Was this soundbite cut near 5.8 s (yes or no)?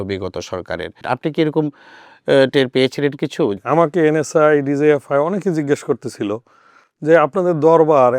no